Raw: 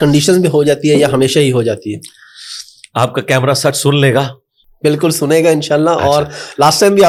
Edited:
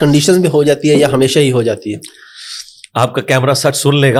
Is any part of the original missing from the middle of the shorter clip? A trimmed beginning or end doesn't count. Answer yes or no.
no